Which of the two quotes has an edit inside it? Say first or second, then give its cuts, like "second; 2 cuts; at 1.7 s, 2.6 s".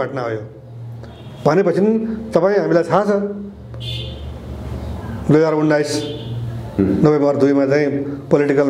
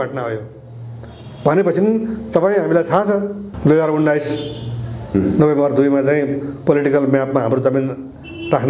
second; 1 cut; at 3.5 s